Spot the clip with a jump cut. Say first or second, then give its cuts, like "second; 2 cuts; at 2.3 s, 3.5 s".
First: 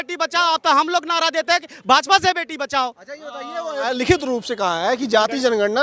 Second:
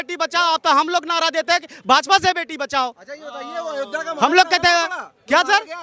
first; 1 cut; at 3.9 s